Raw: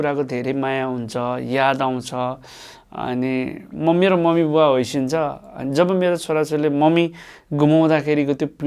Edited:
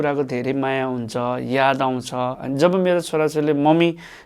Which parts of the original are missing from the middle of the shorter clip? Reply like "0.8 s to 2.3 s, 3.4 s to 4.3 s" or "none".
2.4 s to 5.6 s